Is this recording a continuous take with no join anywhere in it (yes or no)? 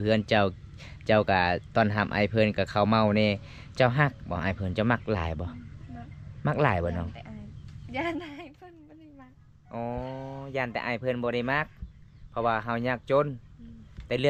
yes